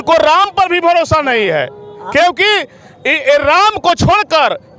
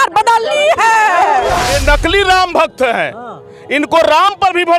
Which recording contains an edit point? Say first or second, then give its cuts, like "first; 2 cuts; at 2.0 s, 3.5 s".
second; 1 cut; at 1.4 s